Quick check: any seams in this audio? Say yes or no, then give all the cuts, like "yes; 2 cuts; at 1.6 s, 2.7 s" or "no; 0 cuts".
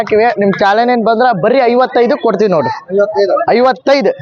no; 0 cuts